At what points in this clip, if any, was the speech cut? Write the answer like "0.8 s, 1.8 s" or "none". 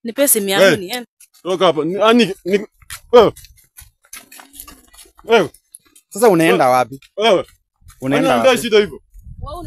none